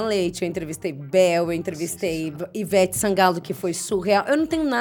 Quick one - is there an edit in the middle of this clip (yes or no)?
no